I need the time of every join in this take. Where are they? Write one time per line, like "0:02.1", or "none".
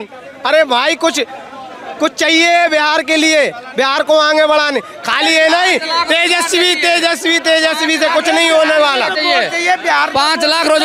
none